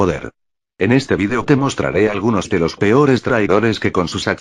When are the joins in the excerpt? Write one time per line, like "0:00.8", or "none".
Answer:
none